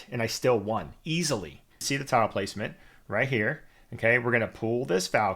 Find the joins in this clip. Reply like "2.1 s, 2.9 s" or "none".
1.8 s